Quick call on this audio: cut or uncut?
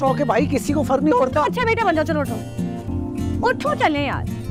uncut